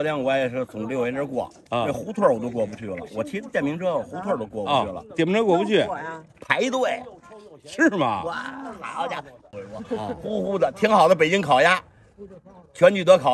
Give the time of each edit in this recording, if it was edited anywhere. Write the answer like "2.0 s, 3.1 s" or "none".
9.5 s